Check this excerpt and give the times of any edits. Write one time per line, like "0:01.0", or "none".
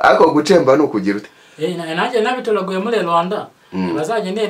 0:01.2